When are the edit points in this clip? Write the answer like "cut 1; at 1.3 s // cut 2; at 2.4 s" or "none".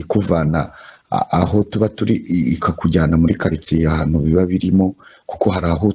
none